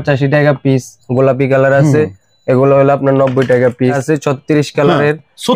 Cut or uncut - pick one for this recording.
cut